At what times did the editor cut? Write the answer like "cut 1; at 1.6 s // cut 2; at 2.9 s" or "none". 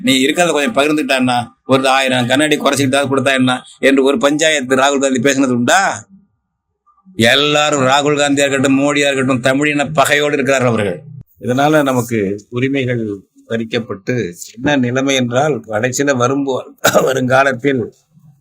cut 1; at 11.1 s